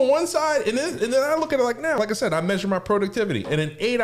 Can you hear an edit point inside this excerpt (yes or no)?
yes